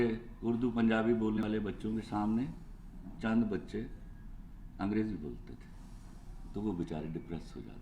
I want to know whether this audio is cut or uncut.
cut